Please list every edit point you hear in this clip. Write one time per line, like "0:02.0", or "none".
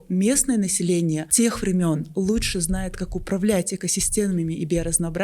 0:01.3